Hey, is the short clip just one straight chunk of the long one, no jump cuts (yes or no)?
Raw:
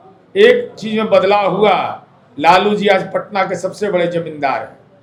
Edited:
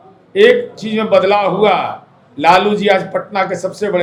yes